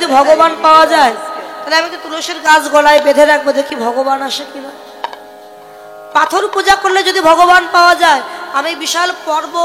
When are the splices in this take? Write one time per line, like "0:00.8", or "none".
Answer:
none